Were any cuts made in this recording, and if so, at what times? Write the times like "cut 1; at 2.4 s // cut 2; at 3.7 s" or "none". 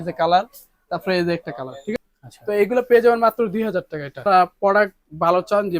cut 1; at 1.9 s // cut 2; at 4.2 s